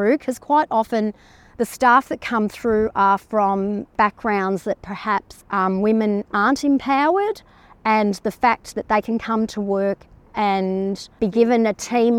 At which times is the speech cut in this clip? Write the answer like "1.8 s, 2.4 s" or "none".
3.9 s, 5.4 s

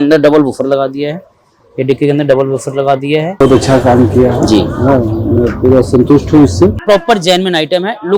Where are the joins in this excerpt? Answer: 3.3 s, 6.8 s

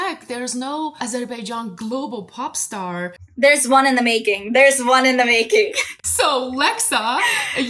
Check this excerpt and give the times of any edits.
none

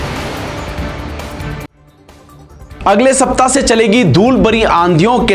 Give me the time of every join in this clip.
1.6 s

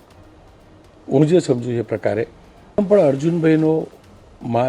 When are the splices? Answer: 2.8 s

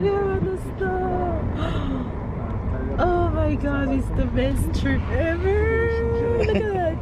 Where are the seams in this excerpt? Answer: none

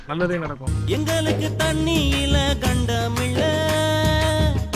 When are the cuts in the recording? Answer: 0.9 s

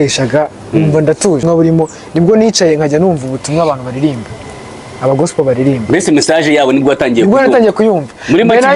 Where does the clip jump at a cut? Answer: 1.4 s

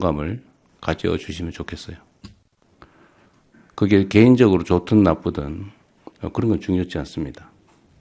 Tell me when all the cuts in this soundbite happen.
none

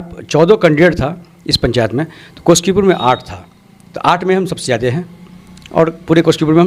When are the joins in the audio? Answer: none

